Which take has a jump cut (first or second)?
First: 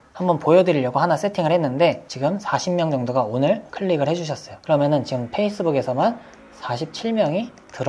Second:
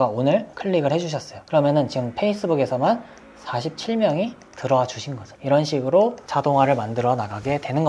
first